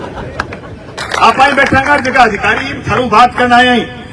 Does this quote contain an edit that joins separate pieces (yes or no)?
yes